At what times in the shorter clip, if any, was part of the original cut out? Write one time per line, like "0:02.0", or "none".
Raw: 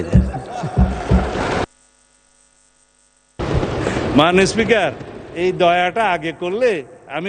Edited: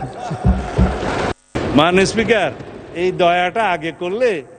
0:01.5